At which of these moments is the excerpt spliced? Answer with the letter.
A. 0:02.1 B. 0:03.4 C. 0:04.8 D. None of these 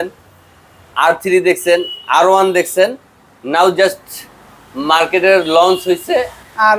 D